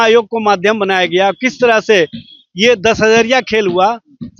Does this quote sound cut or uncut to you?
uncut